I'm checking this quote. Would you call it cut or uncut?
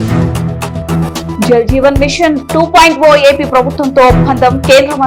cut